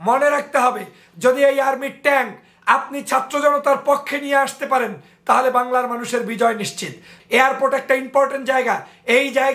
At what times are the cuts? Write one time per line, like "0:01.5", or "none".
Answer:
0:07.1